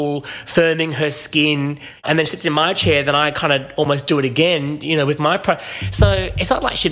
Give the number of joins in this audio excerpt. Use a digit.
1